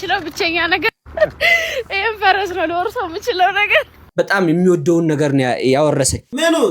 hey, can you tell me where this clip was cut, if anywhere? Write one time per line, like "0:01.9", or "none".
0:04.0